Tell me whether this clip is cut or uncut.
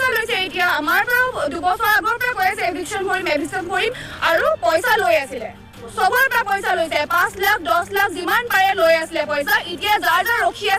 uncut